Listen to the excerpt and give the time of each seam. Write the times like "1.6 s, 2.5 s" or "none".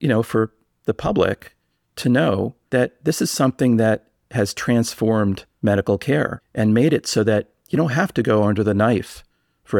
2.6 s, 5.5 s, 6.4 s